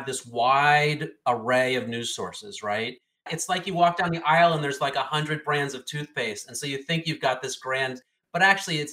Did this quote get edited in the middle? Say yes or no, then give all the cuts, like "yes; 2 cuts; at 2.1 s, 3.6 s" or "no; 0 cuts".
yes; 1 cut; at 3.2 s